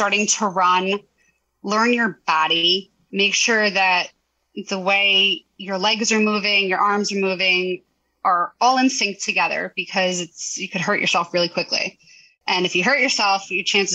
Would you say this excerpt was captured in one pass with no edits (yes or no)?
yes